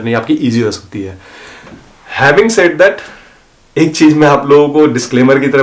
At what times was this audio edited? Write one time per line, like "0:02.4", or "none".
none